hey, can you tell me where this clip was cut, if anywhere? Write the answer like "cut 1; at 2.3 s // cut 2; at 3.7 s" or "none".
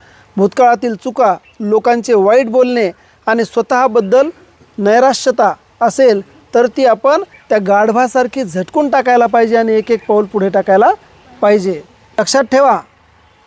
cut 1; at 11.9 s